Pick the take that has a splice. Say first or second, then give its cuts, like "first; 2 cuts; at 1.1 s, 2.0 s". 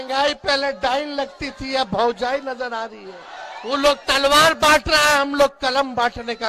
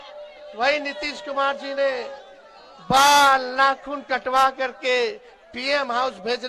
first; 1 cut; at 3.4 s